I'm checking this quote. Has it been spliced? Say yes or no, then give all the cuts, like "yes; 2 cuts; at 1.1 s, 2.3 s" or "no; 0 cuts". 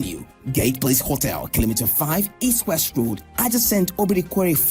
yes; 1 cut; at 1.6 s